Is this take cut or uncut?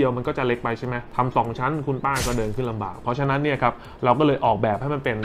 cut